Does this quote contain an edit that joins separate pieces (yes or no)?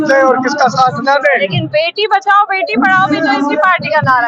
no